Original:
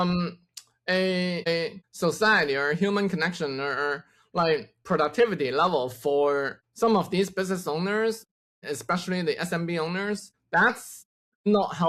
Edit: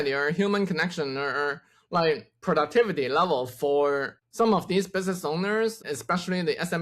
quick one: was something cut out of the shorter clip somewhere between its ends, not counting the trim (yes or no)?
yes